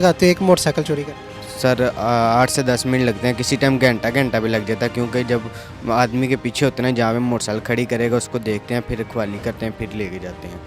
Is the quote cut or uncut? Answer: uncut